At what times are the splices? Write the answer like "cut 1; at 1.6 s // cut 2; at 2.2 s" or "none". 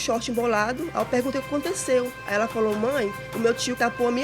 cut 1; at 3.2 s

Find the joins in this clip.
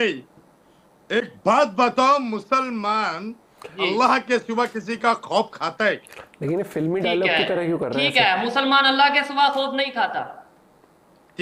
none

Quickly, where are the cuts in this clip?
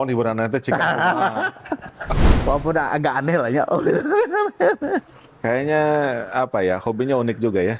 cut 1; at 2.3 s

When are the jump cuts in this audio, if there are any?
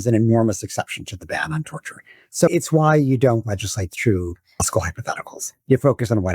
cut 1; at 2.5 s // cut 2; at 4.6 s

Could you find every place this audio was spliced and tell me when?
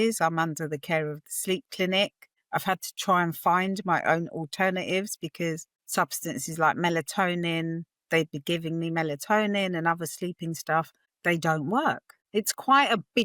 cut 1; at 12.1 s

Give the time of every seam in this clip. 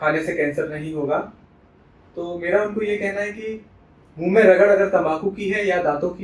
none

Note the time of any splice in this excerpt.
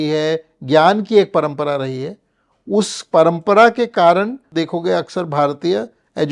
cut 1; at 4.4 s

